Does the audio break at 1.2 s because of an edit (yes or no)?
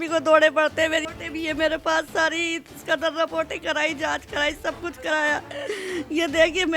yes